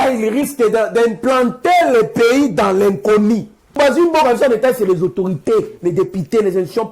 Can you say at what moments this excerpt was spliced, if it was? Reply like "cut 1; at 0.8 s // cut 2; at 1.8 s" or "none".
cut 1; at 3.8 s